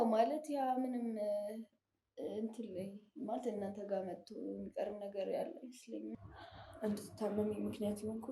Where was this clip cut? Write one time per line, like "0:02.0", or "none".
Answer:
0:06.1